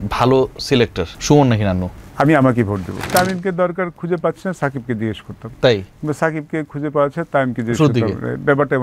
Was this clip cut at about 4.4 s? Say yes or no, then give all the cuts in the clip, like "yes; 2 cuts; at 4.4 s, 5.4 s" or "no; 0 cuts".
no; 3 cuts; at 1.1 s, 2.0 s, 3.1 s